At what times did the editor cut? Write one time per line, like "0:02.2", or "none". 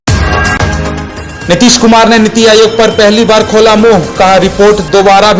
none